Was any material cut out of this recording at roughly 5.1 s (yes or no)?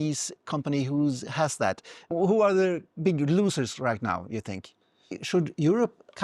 yes